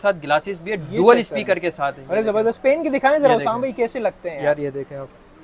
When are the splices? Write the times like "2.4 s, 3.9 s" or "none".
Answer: none